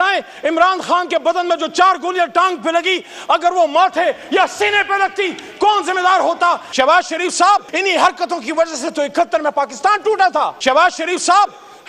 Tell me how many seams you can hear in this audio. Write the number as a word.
three